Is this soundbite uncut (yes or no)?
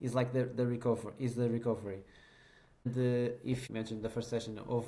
no